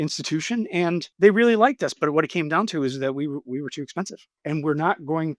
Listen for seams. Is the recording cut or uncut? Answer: cut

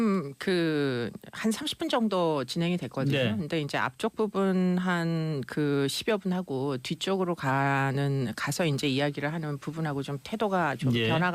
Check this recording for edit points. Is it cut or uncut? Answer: cut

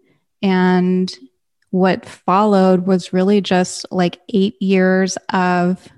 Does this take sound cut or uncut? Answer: uncut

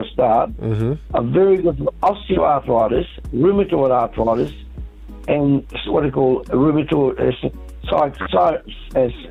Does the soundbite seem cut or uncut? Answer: uncut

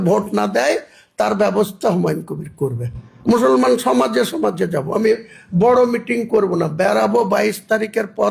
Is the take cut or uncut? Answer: uncut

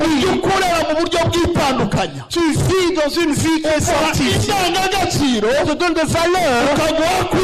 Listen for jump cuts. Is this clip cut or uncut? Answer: uncut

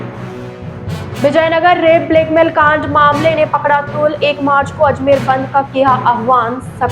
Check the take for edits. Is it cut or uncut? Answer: cut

